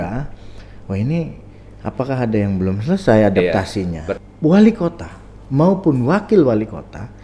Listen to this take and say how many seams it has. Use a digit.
1